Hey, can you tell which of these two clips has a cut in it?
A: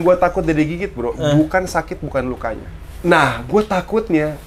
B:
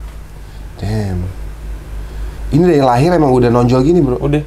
A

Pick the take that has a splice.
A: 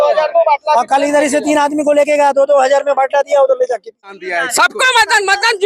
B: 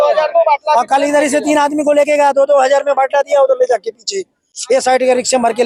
A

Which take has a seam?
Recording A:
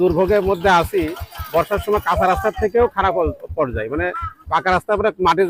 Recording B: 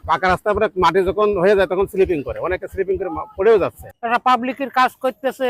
B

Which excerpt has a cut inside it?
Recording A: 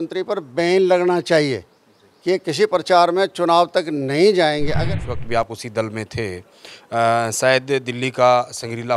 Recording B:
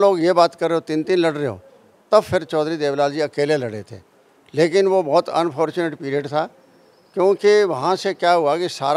A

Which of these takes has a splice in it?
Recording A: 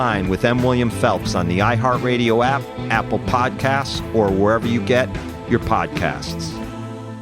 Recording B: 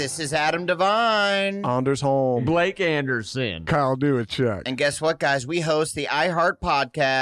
A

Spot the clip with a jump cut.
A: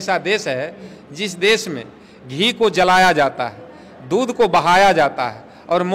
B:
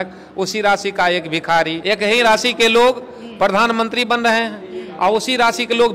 B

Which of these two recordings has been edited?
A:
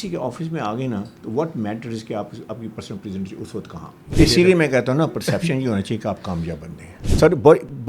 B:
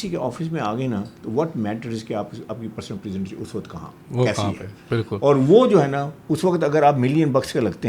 A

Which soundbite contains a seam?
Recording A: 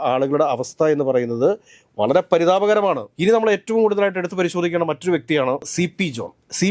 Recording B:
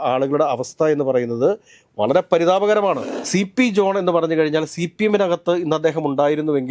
B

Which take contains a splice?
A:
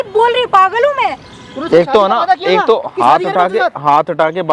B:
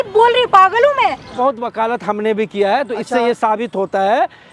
B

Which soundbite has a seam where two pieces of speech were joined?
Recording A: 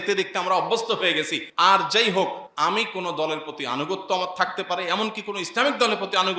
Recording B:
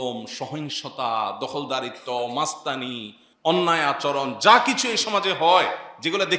A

